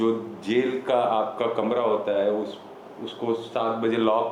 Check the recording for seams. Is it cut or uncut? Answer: uncut